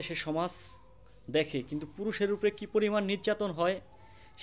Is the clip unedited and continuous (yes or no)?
yes